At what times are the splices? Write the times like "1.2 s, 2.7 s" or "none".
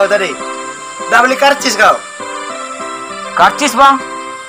none